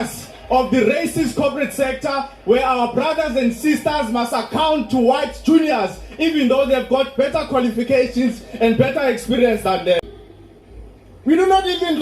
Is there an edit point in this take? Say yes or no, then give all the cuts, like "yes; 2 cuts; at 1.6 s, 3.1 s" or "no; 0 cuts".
yes; 1 cut; at 10.0 s